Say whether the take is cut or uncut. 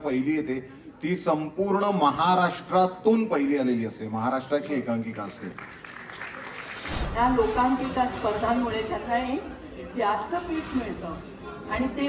cut